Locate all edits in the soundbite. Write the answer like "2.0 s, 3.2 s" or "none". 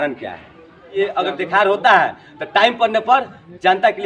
0.9 s

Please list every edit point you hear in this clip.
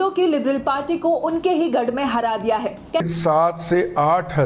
3.0 s

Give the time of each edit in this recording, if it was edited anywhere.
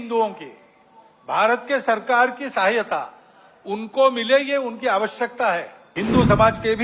5.8 s

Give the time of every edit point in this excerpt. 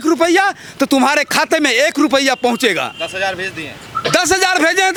none

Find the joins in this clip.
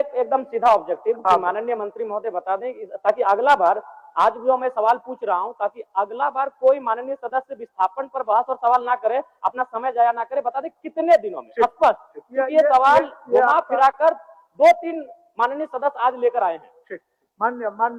none

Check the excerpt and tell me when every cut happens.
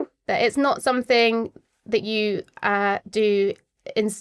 none

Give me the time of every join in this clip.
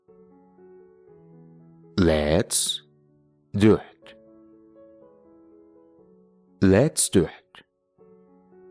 none

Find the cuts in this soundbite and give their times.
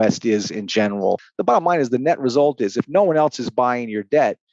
1.3 s

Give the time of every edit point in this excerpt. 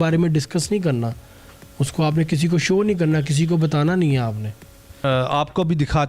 4.9 s

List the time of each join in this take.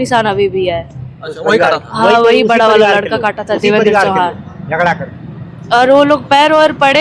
none

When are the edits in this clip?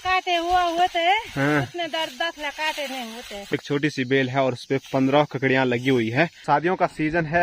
3.5 s, 6.4 s

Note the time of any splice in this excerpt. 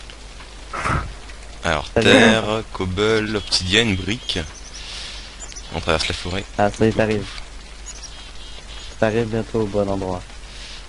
none

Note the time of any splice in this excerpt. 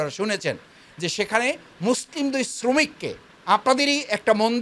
none

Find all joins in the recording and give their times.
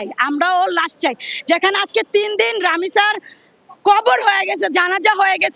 none

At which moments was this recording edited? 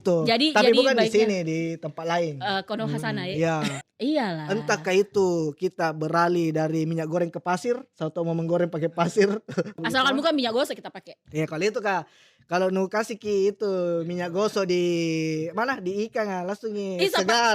3.8 s, 9.8 s

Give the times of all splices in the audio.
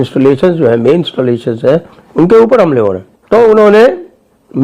3.1 s

